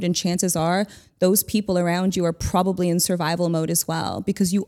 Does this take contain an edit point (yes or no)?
no